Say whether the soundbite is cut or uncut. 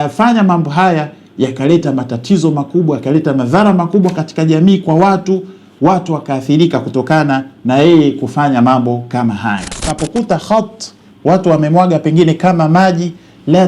cut